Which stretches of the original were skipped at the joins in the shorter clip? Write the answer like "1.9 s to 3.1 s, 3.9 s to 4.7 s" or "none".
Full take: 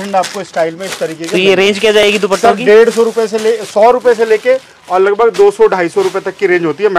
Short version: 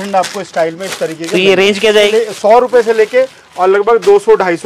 2.0 s to 3.3 s

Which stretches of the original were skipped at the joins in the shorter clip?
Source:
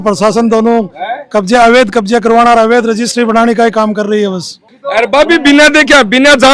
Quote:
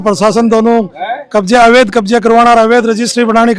none

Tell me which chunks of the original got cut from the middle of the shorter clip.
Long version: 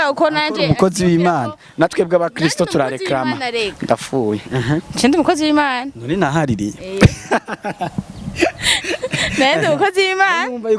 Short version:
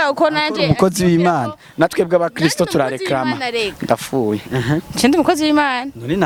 none

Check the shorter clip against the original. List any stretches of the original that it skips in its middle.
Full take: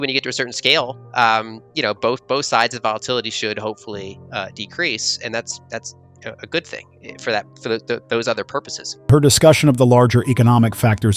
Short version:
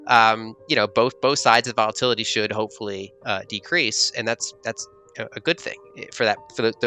none

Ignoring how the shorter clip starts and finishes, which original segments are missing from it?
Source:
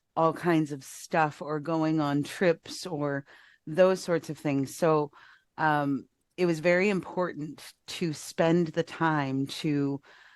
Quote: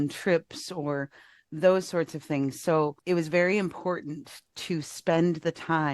5.1 s to 6.3 s

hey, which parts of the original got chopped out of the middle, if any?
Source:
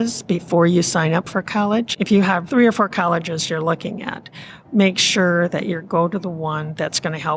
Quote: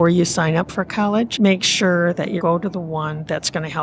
1.9 s to 4.7 s, 5.7 s to 5.9 s

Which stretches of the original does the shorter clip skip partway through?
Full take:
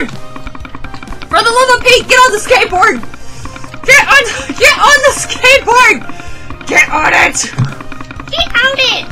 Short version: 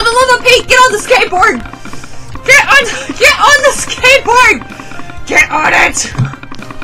none

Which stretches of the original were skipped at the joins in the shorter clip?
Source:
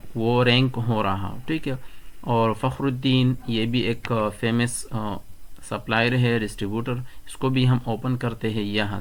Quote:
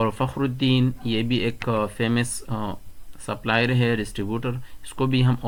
none

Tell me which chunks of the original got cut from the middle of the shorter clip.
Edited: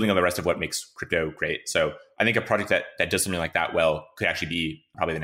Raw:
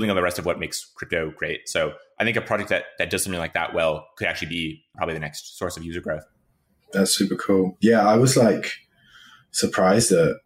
none

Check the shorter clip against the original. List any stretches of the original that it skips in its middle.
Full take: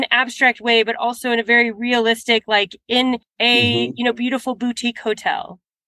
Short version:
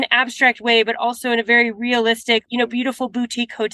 2.5 s to 3.9 s

